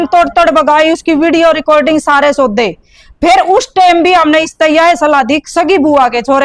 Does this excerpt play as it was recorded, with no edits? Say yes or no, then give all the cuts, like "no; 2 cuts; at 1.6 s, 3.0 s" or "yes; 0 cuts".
yes; 0 cuts